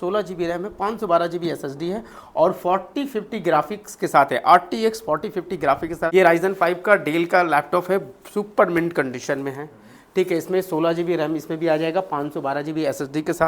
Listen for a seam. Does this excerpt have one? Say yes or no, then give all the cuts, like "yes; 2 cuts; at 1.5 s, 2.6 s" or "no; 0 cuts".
yes; 1 cut; at 6.1 s